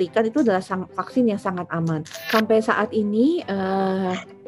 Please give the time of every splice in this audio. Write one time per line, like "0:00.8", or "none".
0:02.1